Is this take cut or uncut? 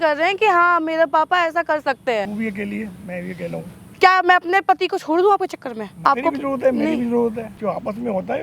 cut